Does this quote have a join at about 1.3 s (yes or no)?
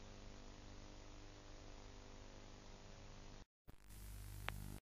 yes